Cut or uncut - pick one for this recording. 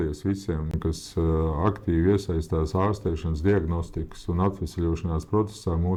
uncut